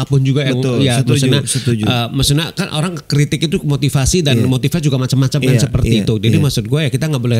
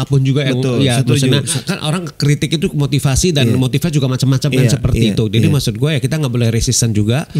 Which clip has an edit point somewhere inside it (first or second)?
second